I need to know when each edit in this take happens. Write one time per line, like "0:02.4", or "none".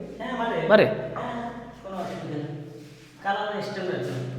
none